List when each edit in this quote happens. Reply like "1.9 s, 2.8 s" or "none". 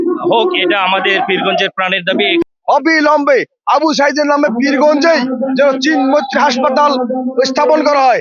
2.4 s